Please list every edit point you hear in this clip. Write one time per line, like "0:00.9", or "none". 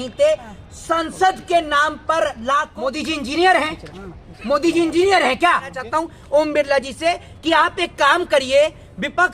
0:02.7
0:05.7